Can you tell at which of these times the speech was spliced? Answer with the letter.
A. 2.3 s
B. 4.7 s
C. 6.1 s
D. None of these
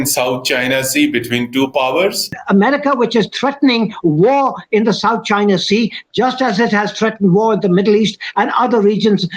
A